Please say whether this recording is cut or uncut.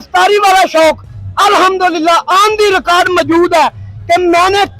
uncut